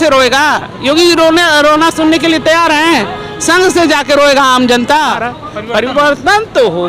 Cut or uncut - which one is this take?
cut